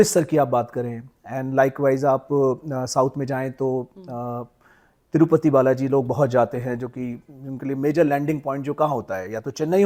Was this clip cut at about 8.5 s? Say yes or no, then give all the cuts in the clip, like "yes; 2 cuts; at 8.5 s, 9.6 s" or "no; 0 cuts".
no; 0 cuts